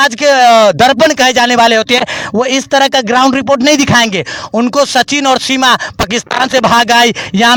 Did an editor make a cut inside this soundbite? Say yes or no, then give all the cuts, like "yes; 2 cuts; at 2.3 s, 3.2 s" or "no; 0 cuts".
no; 0 cuts